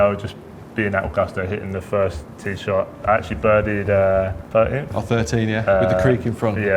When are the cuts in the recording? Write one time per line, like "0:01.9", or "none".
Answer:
0:03.0
0:04.4